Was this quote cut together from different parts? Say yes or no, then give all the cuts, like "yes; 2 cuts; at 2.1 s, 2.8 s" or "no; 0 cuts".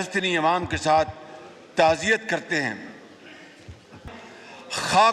yes; 1 cut; at 4.0 s